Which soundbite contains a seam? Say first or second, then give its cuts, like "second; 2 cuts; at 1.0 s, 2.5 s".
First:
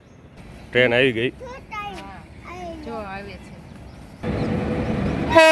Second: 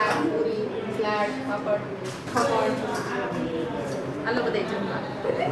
first; 1 cut; at 4.2 s